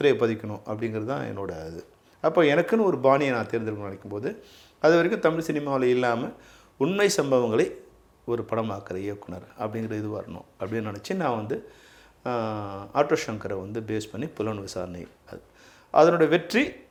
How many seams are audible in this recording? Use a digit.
0